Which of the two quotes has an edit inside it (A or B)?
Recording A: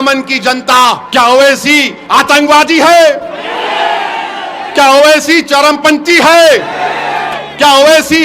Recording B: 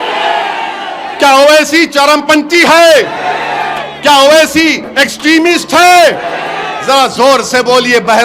A